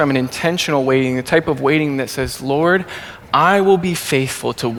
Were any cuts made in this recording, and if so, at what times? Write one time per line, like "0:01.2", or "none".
none

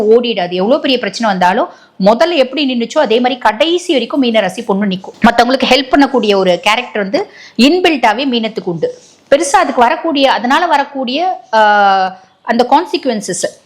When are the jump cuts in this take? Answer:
none

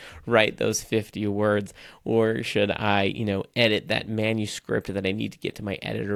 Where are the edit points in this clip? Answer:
none

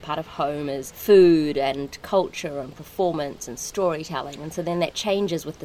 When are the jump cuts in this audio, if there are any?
0:00.9

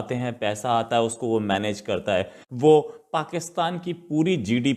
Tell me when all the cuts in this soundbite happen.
0:02.4

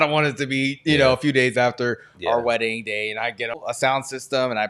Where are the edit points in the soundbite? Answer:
0:03.5

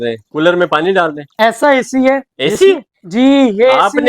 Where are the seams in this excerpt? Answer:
0:01.2

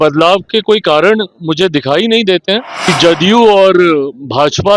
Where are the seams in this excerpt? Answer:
0:02.9

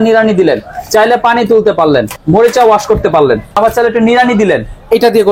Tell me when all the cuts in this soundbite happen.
0:02.1
0:03.5

